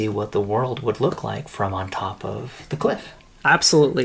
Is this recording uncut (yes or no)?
yes